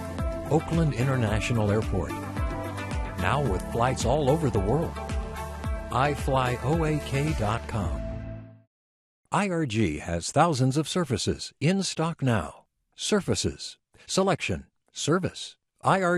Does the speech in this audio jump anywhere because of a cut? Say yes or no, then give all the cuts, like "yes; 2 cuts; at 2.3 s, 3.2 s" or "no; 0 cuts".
no; 0 cuts